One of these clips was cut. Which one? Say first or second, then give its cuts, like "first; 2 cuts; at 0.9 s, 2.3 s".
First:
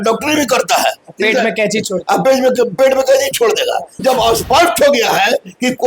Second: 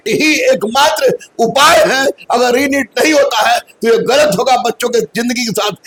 first; 1 cut; at 4.0 s